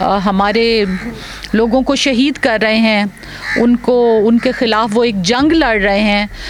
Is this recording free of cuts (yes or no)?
yes